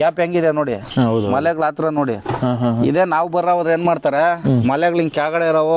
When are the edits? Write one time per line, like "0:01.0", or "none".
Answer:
none